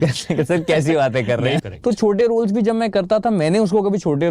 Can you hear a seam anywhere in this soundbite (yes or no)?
yes